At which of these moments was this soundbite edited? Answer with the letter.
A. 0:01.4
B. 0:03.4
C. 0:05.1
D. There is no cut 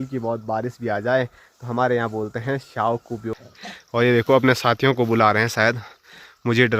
B